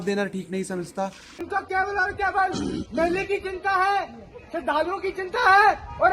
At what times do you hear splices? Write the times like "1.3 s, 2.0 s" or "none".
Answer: 1.4 s